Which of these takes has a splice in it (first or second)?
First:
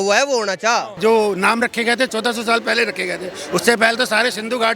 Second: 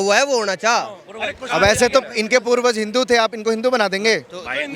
first